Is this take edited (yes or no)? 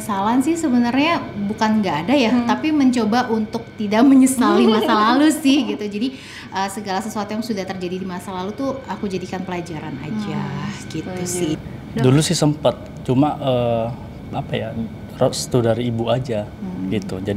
no